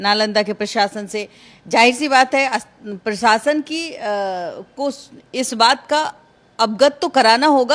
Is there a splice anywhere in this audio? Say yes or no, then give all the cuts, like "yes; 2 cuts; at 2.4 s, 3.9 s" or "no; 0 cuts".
no; 0 cuts